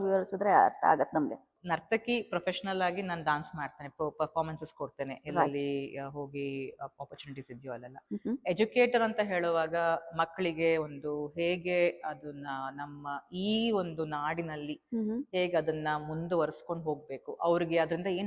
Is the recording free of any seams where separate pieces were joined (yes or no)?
yes